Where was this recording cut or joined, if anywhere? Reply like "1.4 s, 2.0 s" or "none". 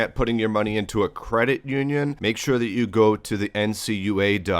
2.2 s